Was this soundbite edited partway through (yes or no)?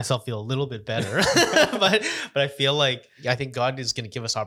yes